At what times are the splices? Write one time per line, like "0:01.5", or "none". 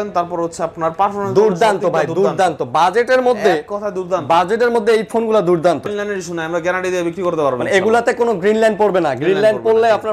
0:05.9